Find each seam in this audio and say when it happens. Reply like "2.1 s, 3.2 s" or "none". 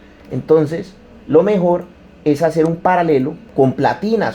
3.4 s